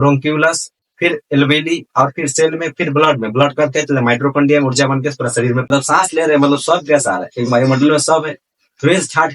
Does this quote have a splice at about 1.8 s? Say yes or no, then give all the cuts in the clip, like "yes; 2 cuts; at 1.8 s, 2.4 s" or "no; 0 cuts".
no; 1 cut; at 5.6 s